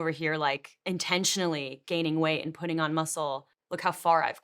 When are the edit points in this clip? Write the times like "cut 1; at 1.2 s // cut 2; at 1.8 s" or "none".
cut 1; at 3.5 s